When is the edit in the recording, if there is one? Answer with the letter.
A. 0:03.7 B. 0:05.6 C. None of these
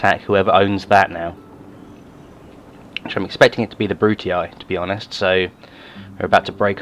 B